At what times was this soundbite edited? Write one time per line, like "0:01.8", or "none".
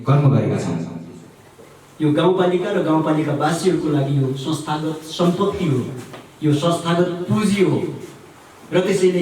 0:01.2